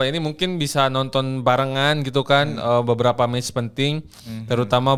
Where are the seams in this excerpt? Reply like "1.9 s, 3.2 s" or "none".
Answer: none